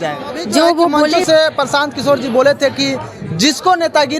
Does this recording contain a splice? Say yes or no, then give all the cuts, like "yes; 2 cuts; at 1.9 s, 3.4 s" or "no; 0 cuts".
yes; 1 cut; at 1.2 s